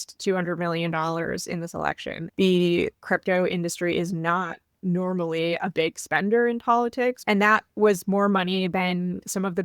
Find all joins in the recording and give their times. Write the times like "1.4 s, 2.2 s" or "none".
2.2 s, 7.2 s